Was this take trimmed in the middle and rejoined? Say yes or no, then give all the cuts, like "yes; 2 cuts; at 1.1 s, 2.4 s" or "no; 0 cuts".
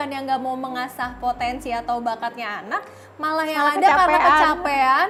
no; 0 cuts